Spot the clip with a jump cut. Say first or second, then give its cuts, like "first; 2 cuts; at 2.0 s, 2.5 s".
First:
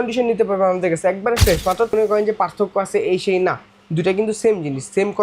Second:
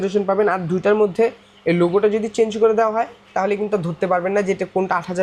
first; 1 cut; at 1.9 s